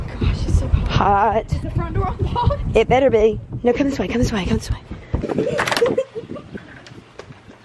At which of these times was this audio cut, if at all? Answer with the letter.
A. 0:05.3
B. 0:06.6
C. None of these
A